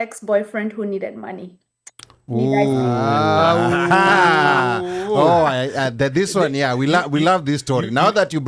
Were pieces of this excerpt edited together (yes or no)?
no